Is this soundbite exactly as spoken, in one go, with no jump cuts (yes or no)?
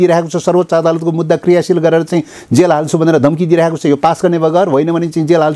yes